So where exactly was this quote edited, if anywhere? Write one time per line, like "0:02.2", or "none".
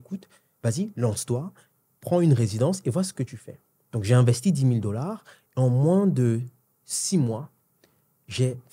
none